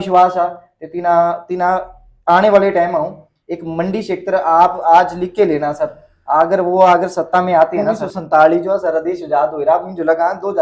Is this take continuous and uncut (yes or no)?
no